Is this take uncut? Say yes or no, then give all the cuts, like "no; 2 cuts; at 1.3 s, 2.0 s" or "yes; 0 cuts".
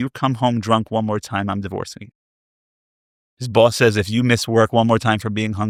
yes; 0 cuts